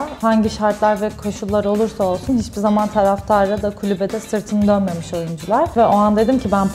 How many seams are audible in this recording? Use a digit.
1